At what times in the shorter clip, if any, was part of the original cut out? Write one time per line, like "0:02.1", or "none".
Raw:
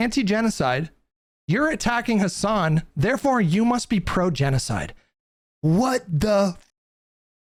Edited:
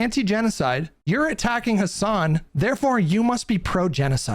0:00.9